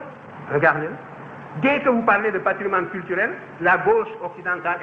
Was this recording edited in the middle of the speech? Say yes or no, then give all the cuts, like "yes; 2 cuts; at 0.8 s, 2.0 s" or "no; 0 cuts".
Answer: no; 0 cuts